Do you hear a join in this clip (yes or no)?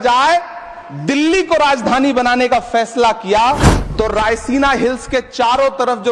yes